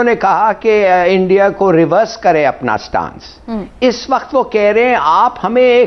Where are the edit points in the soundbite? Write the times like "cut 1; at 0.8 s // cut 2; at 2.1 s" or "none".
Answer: none